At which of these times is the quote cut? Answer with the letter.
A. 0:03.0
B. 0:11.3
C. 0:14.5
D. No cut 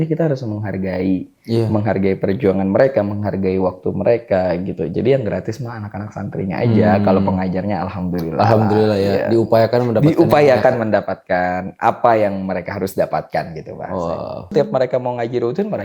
C